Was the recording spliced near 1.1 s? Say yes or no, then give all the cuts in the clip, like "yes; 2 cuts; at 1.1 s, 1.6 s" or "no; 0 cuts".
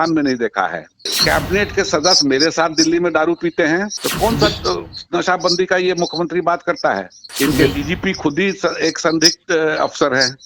yes; 3 cuts; at 1.1 s, 4.0 s, 7.2 s